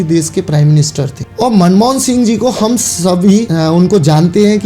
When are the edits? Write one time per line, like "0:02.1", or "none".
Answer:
0:01.2
0:03.5